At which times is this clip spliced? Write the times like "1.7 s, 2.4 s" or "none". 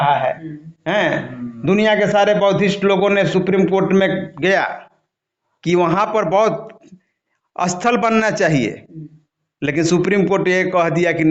none